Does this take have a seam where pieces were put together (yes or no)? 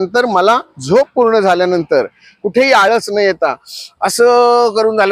no